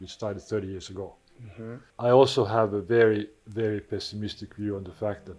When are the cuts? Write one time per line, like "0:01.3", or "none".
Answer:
0:01.9